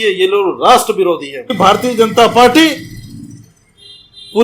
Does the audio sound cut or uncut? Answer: cut